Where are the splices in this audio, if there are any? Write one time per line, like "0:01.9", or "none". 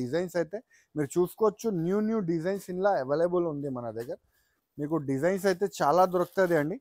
none